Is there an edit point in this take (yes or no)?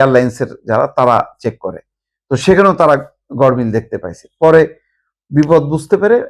no